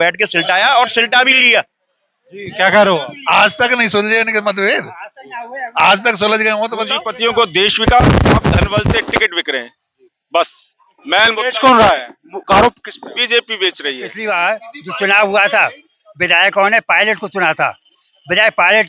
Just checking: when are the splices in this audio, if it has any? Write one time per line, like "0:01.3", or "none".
0:07.0
0:14.1

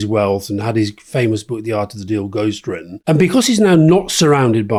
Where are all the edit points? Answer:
none

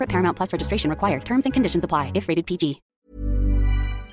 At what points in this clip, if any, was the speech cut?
0:02.9

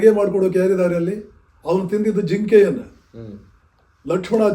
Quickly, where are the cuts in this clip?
none

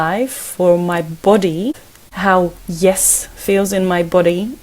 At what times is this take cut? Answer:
0:01.7

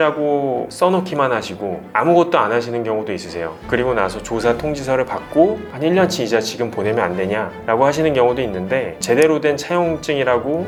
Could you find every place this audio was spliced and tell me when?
none

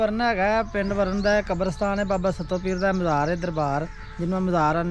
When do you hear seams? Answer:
none

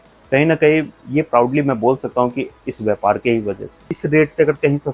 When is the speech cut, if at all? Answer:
0:03.9

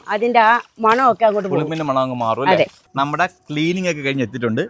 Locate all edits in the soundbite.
0:02.8

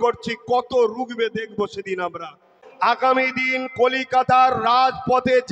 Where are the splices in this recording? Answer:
0:02.6

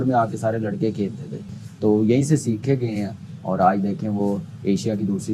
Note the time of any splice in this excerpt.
none

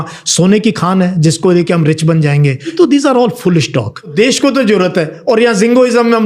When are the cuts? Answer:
0:02.7
0:04.1

